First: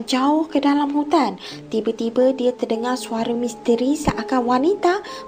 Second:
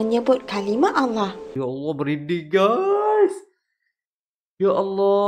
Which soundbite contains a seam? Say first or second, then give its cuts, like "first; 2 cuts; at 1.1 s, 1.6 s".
second; 1 cut; at 1.5 s